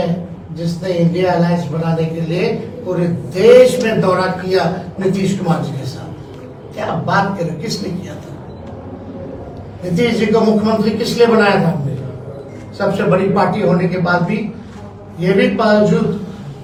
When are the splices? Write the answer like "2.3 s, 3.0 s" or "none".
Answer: none